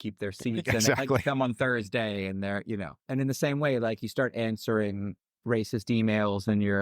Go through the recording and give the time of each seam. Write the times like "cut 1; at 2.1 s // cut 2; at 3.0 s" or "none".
cut 1; at 3.0 s